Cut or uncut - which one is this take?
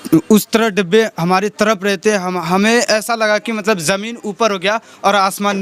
uncut